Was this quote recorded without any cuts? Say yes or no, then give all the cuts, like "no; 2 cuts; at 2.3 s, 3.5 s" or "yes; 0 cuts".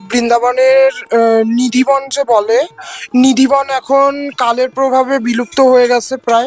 yes; 0 cuts